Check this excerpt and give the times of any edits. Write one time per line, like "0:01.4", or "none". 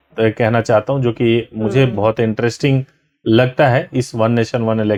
none